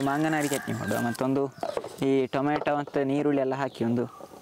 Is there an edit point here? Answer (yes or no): no